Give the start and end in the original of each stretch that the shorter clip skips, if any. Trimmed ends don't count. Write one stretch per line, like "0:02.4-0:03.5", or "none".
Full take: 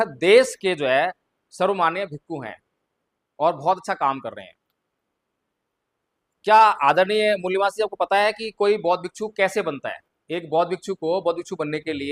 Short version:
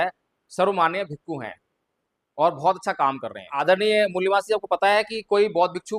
0:04.6-0:06.9